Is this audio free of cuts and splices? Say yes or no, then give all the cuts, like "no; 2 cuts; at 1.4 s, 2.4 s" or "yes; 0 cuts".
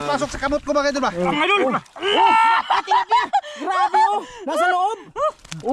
no; 1 cut; at 1.3 s